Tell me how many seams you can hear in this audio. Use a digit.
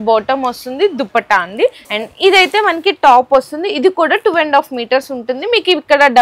1